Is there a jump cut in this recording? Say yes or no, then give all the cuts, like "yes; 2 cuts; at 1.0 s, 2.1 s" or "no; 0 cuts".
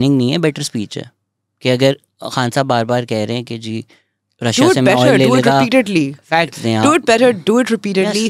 no; 0 cuts